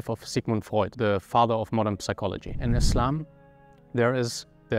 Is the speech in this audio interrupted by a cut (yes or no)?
no